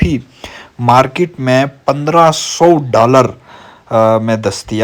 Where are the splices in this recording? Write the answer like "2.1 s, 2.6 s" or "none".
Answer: none